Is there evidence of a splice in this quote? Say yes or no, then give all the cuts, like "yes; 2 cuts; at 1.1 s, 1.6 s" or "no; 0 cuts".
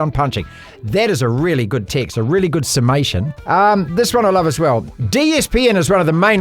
yes; 2 cuts; at 3.3 s, 4.9 s